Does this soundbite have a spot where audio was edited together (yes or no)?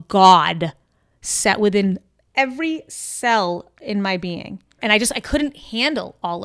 no